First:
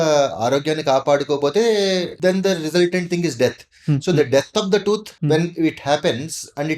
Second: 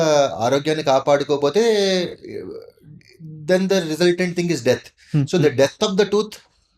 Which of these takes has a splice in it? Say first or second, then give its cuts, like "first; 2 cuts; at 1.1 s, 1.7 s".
first; 2 cuts; at 2.1 s, 5.1 s